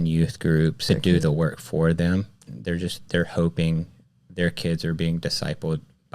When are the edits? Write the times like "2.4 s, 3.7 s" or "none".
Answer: 0.8 s, 2.5 s